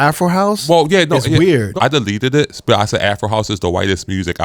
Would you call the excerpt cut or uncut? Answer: uncut